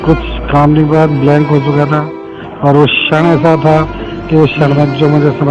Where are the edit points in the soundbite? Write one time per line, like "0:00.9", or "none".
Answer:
none